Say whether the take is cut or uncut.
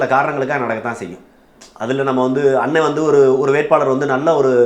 uncut